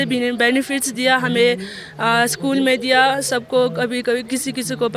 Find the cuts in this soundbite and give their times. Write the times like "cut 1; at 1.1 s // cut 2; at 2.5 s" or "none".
none